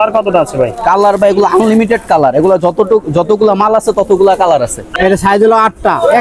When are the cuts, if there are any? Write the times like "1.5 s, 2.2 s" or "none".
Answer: 4.9 s